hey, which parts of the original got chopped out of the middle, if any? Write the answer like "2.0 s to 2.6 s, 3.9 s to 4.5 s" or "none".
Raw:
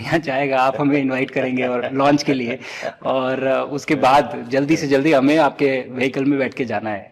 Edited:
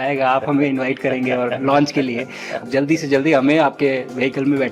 2.9 s to 4.4 s